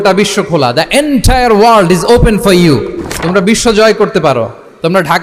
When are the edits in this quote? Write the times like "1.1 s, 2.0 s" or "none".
none